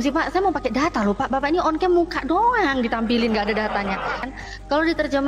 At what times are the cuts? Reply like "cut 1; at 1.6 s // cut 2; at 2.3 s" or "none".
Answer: cut 1; at 4.2 s